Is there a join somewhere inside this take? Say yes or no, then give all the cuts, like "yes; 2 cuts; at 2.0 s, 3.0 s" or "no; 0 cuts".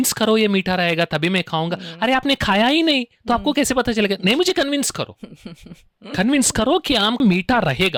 no; 0 cuts